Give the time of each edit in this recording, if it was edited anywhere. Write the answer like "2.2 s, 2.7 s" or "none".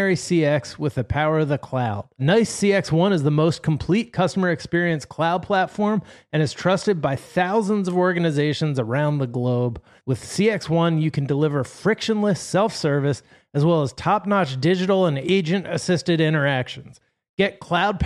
none